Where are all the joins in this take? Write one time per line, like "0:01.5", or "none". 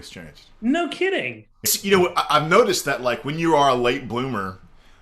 0:01.7

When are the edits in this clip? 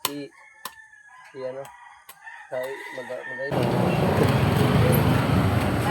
0:03.5

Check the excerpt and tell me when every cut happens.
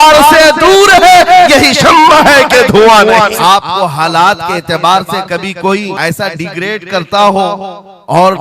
0:03.4
0:05.9

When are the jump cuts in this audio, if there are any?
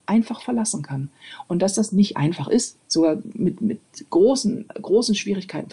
0:02.8

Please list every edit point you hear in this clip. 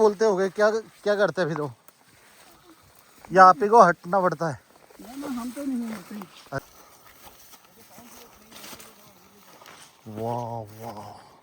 0:06.6

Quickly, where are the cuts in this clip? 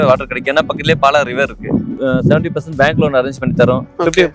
0:01.9

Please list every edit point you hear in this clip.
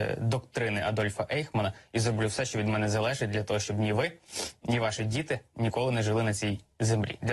0:01.8

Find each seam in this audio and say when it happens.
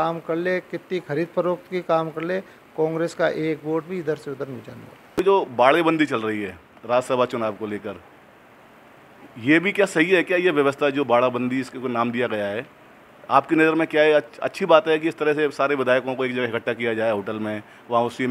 0:05.2

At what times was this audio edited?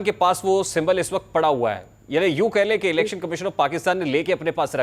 none

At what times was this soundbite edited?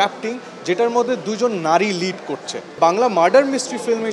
0:02.8

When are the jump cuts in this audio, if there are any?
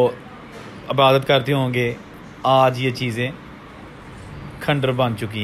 none

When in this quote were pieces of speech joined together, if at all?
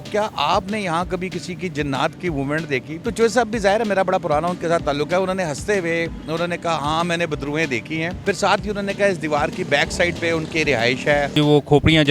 0:02.9
0:08.2
0:11.3

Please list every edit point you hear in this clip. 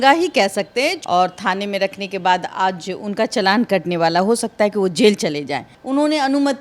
0:01.0
0:05.7

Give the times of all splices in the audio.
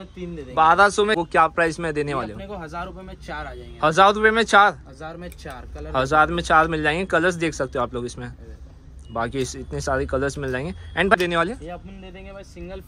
0:01.2
0:11.1

